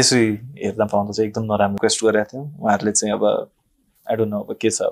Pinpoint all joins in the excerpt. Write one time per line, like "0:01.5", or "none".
0:01.8